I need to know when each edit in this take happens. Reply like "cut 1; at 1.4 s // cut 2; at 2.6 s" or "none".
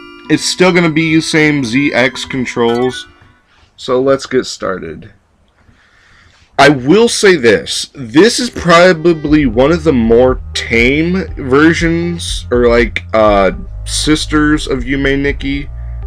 cut 1; at 10.8 s

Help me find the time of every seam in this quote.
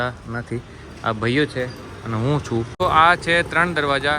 cut 1; at 2.7 s

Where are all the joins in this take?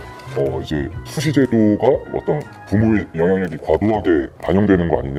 none

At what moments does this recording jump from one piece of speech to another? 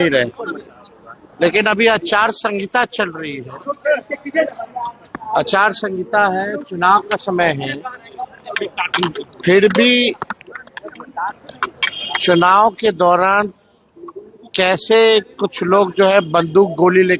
none

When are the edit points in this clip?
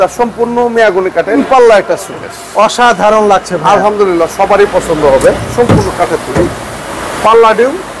cut 1; at 1.4 s // cut 2; at 5.5 s

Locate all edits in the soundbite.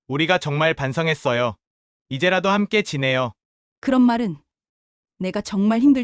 none

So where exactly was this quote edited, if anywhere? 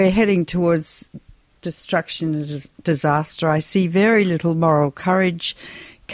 cut 1; at 4.2 s

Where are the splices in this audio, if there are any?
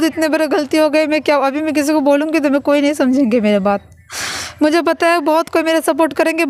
none

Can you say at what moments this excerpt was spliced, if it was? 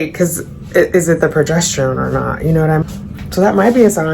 cut 1; at 2.8 s

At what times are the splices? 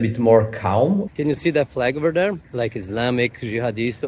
cut 1; at 1.1 s

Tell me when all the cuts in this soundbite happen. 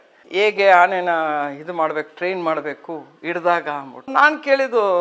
none

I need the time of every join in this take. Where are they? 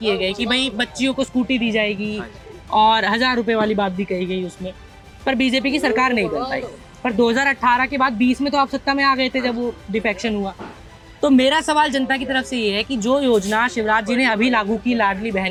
none

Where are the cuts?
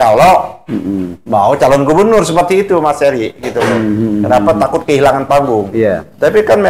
none

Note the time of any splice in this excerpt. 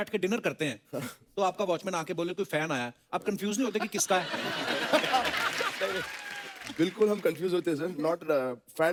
none

